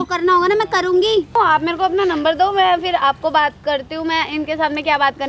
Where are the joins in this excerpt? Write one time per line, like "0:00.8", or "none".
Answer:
0:01.3